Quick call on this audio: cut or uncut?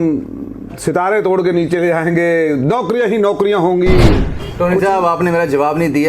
cut